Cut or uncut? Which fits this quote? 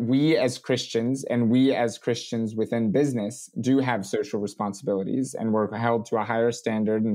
uncut